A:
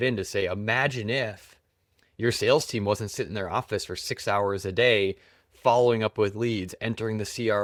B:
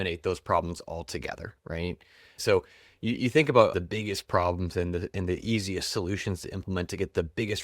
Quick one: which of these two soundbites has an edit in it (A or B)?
B